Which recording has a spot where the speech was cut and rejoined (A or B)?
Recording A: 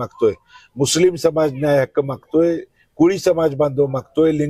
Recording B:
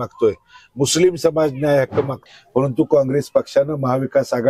B